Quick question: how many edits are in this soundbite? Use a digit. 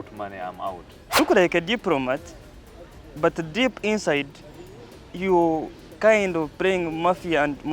1